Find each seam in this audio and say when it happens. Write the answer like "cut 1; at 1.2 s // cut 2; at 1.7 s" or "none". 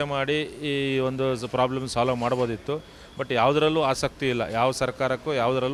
none